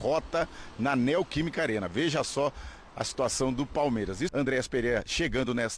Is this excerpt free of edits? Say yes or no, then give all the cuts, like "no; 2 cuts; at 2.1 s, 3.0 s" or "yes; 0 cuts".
no; 1 cut; at 4.3 s